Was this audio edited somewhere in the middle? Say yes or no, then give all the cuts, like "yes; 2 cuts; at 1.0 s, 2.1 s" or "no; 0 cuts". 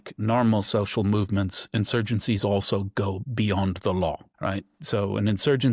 no; 0 cuts